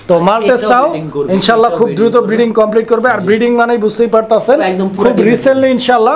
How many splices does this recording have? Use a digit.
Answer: 0